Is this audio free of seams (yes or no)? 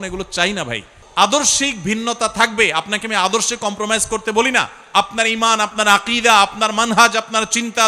no